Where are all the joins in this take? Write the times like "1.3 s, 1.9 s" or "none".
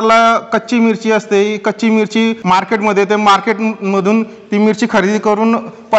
2.4 s